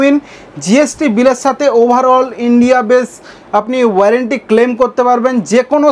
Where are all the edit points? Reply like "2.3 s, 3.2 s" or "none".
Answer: none